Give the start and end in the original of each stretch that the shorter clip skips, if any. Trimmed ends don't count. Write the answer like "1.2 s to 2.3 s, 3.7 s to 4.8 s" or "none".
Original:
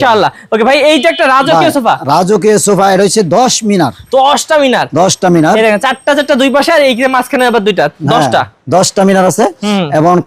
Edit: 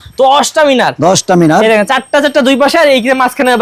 none